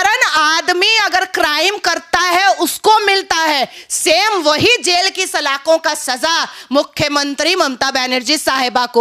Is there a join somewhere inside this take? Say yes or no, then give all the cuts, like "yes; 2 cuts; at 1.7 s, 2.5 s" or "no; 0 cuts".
no; 0 cuts